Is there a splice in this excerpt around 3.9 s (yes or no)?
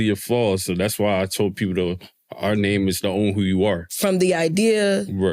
yes